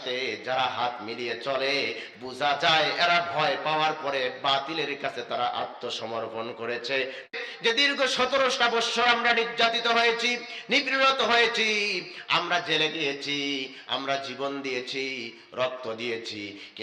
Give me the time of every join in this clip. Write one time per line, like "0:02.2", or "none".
0:07.3